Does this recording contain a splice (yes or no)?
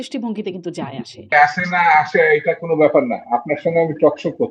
yes